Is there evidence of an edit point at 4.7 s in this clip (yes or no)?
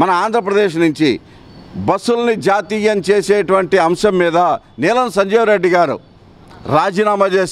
no